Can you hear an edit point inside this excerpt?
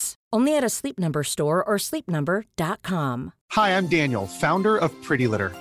yes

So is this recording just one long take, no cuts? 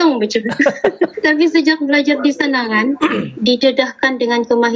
no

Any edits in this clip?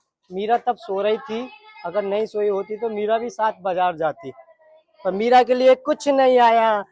no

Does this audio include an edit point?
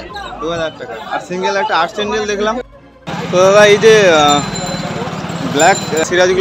yes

